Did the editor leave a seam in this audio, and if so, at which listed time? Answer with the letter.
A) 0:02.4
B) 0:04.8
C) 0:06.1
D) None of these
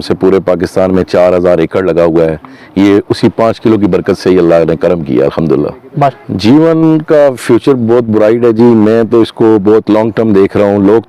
C